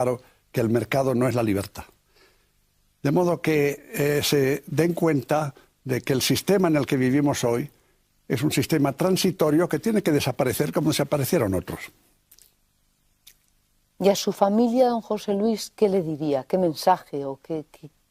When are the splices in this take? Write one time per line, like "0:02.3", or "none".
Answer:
0:05.5